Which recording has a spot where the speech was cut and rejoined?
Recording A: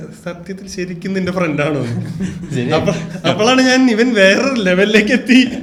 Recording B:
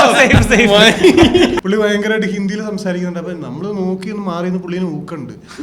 B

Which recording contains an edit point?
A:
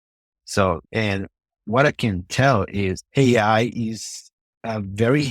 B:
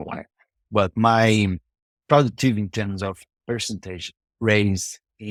A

